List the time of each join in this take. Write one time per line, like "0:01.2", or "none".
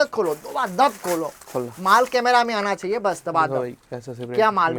none